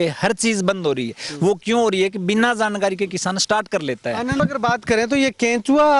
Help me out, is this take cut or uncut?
cut